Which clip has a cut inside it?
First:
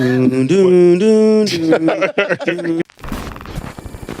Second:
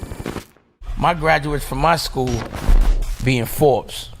first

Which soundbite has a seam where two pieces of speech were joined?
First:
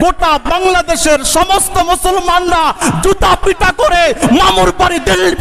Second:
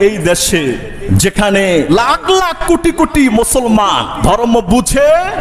second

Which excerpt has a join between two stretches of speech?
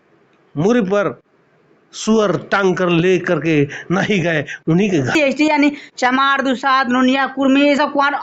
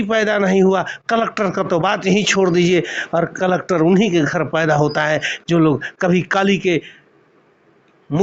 first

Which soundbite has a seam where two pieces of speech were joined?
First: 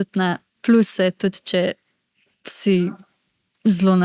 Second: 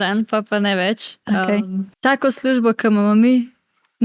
second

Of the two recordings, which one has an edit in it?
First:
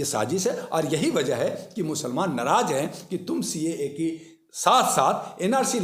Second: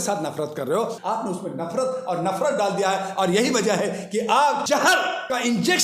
second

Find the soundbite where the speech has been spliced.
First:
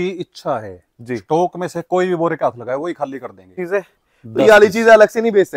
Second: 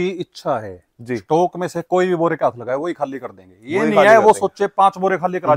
first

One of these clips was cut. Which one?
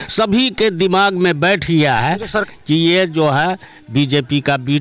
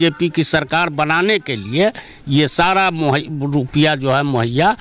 first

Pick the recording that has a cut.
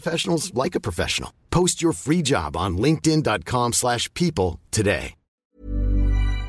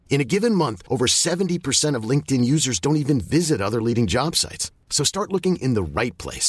first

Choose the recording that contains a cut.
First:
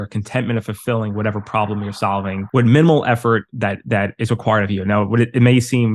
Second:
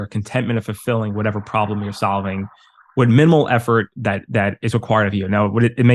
first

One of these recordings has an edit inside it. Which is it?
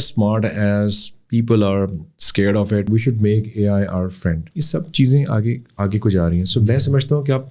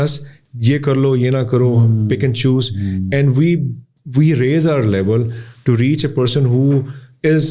first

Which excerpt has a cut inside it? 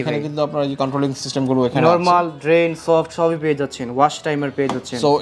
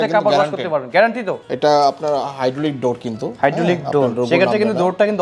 second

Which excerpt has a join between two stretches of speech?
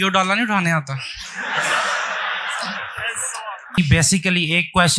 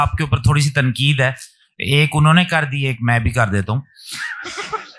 first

